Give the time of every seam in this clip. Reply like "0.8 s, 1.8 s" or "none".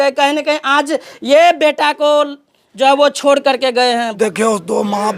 4.2 s